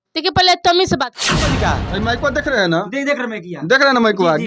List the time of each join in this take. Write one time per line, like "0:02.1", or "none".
0:01.5